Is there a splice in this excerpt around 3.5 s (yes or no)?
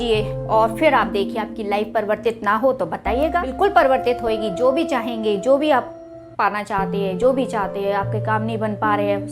yes